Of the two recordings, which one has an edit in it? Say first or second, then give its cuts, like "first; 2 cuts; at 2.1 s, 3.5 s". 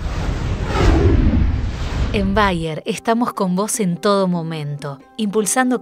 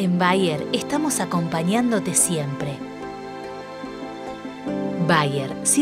first; 1 cut; at 2.0 s